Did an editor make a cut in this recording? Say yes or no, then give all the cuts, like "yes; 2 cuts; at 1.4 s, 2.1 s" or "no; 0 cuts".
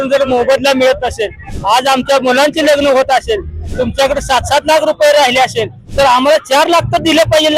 no; 0 cuts